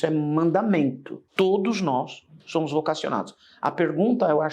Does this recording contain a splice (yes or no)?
yes